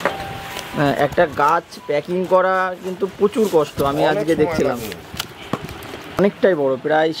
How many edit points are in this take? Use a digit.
1